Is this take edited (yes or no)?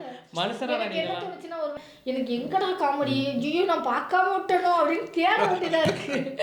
yes